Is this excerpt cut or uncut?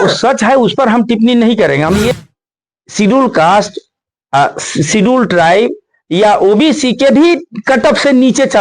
cut